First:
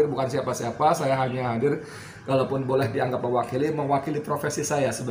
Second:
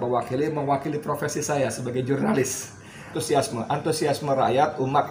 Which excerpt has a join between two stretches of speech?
second; 1 cut; at 3.2 s

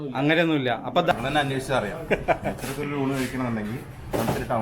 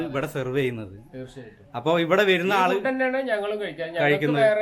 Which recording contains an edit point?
first; 1 cut; at 1.1 s

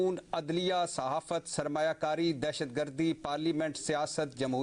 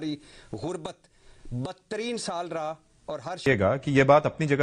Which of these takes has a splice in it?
second; 1 cut; at 3.4 s

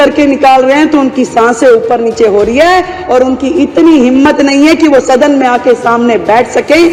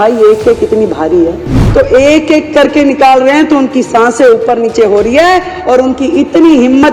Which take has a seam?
second; 1 cut; at 1.6 s

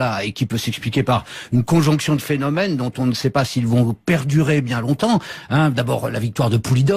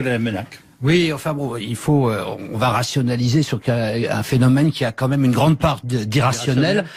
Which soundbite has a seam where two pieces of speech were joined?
first; 1 cut; at 4.0 s

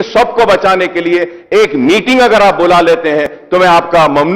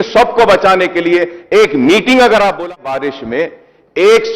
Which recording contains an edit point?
second; 1 cut; at 2.8 s

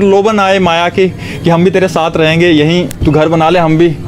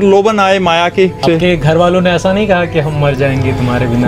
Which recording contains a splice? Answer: second; 1 cut; at 1.2 s

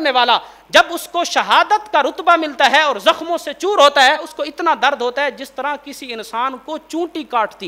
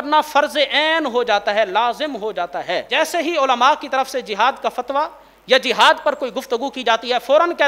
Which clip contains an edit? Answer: second; 1 cut; at 2.9 s

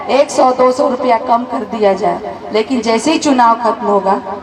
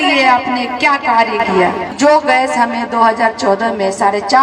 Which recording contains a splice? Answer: second; 1 cut; at 1.9 s

